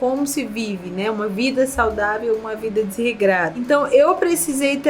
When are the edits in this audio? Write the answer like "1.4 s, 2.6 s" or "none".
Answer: 3.6 s